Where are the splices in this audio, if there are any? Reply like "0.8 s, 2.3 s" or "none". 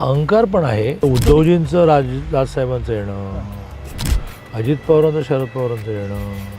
1.0 s